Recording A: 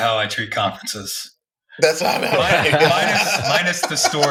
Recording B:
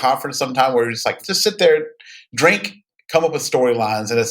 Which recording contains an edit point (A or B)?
B